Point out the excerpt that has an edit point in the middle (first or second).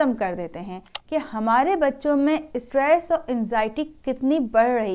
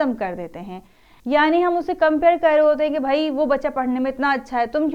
first